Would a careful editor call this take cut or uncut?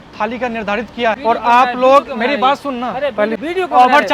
cut